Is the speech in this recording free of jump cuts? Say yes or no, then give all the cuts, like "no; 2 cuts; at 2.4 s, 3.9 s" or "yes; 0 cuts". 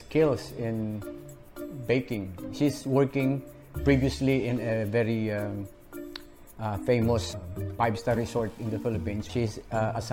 no; 2 cuts; at 7.3 s, 9.3 s